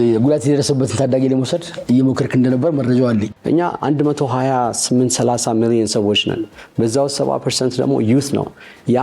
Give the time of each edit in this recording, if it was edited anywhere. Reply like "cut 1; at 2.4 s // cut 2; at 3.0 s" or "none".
cut 1; at 3.3 s